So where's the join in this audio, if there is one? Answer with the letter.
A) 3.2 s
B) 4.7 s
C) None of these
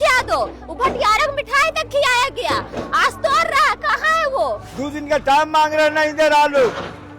B